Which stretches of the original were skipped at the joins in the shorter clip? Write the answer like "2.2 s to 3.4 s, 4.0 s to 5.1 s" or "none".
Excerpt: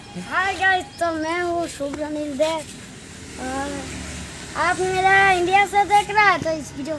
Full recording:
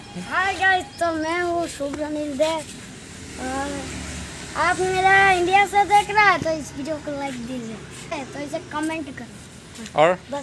none

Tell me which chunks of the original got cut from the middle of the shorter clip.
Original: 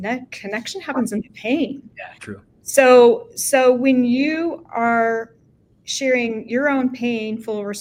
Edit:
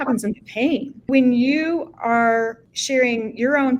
2.0 s to 3.8 s, 5.4 s to 5.8 s

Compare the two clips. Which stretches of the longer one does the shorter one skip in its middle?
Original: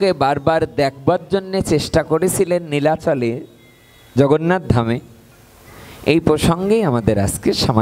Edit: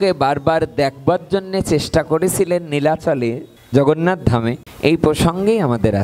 3.5 s to 3.9 s, 5.1 s to 5.9 s

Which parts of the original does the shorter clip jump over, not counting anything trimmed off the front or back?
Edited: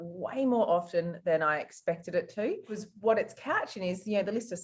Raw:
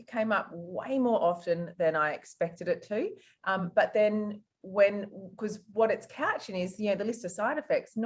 3.3 s to 5.5 s

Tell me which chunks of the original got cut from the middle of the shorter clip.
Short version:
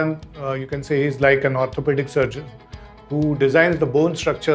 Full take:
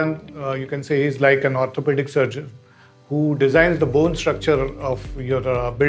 none

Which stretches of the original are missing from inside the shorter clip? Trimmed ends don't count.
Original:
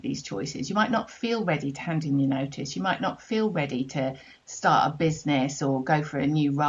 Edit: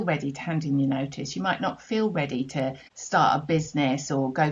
4.3 s to 4.4 s

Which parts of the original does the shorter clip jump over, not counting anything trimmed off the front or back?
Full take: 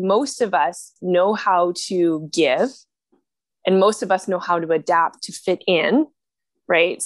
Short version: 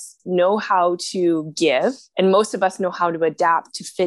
2.8 s to 3.5 s

